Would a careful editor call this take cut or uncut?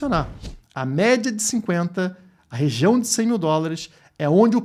uncut